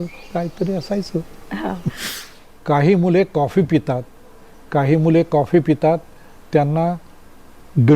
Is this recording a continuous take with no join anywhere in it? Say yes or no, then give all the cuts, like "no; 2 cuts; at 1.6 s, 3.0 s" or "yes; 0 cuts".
no; 1 cut; at 2.1 s